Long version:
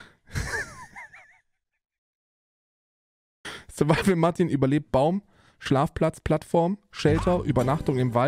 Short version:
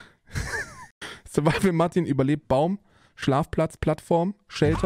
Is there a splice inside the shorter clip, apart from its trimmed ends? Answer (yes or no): yes